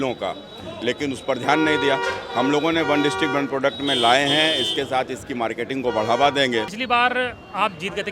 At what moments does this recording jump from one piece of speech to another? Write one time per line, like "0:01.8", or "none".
0:06.8